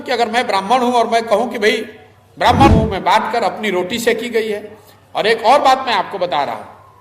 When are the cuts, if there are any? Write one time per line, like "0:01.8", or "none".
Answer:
0:02.7

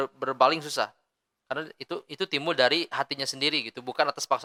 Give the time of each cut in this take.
none

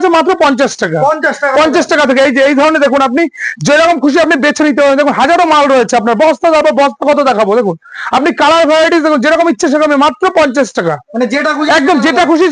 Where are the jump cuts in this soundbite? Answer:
none

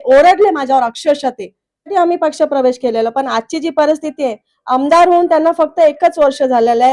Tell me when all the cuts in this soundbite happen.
0:01.9

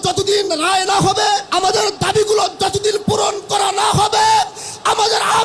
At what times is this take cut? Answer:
0:01.5

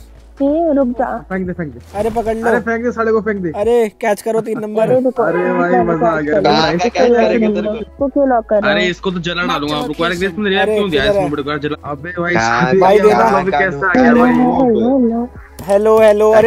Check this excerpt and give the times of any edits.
0:01.2
0:07.8
0:11.8

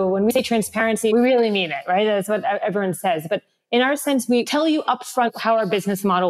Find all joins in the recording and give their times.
0:01.0

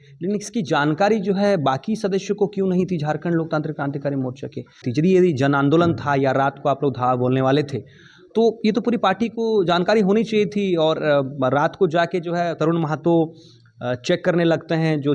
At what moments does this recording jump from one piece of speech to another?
0:04.8

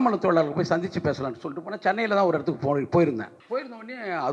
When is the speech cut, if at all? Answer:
0:03.3

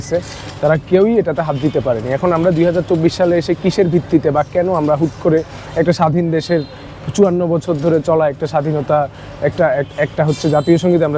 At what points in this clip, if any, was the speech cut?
none

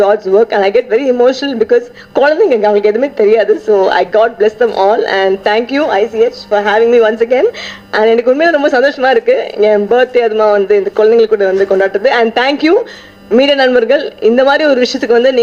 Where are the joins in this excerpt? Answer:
none

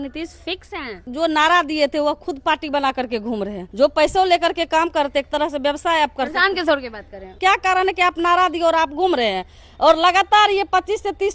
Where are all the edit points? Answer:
0:01.0
0:03.6
0:07.3

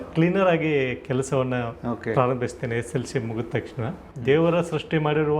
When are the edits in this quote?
0:04.0

